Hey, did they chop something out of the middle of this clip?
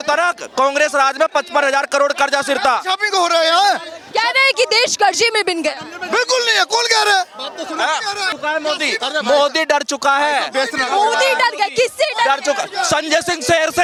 no; 0 cuts

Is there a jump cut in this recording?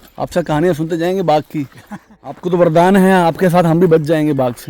yes; 1 cut; at 2.1 s

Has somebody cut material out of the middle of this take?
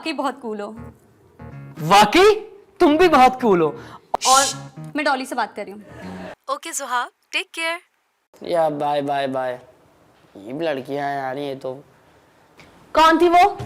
yes; 1 cut; at 6.3 s

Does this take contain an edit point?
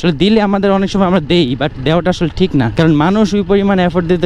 yes; 1 cut; at 2.7 s

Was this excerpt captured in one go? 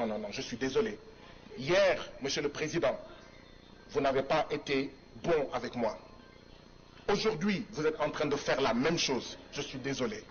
yes; 0 cuts

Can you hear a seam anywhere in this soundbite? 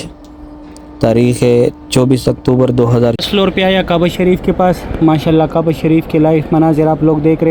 yes; 1 cut; at 3.2 s

